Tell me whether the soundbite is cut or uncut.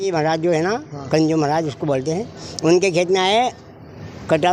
uncut